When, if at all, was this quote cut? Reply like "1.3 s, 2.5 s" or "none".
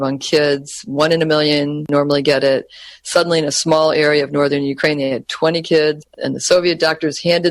1.9 s, 6.1 s